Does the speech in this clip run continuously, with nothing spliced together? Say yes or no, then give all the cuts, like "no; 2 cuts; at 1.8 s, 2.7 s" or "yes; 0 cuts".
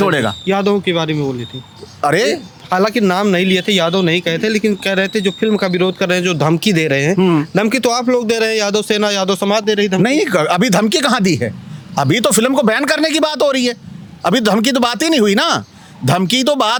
yes; 0 cuts